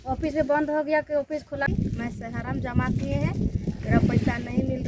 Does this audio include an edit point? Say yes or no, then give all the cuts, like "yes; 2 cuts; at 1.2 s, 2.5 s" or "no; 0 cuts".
yes; 1 cut; at 1.6 s